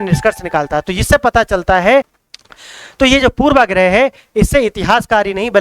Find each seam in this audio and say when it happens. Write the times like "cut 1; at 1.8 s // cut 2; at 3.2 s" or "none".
cut 1; at 2.2 s

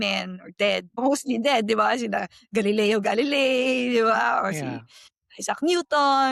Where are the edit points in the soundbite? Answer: none

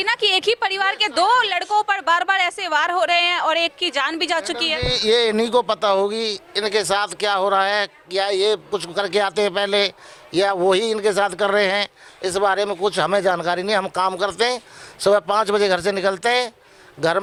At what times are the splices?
none

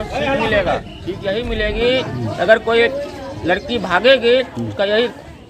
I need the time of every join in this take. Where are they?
cut 1; at 0.9 s

